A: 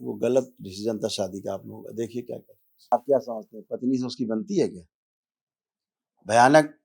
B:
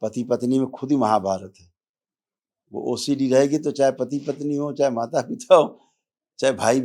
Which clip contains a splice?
A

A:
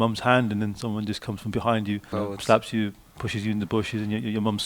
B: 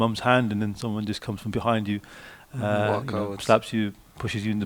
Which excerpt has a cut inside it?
A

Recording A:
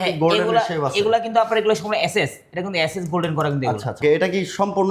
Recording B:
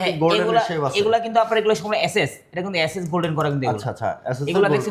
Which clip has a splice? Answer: A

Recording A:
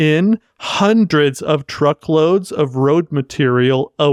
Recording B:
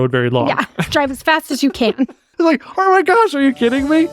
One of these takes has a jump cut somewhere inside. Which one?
B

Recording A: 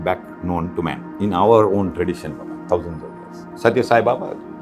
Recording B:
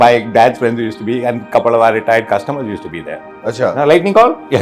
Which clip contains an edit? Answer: A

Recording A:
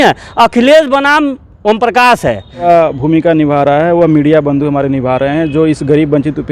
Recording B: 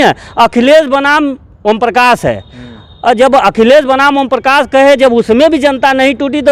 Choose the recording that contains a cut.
A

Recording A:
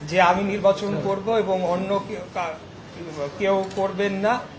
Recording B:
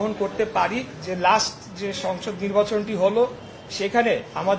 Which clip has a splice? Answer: B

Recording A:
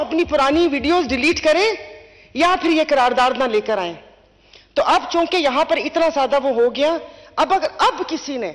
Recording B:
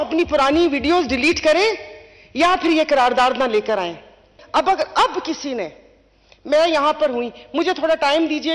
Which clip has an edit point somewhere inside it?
B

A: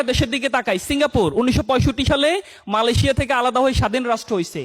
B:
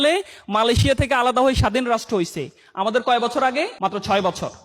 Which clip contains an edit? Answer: B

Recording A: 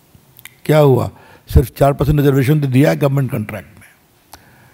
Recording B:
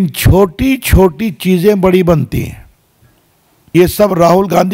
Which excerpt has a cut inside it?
B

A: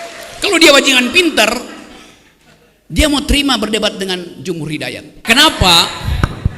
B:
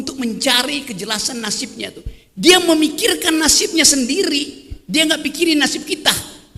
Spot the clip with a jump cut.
A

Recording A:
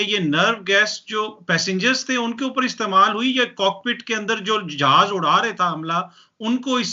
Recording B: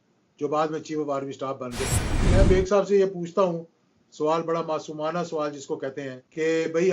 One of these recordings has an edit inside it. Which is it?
B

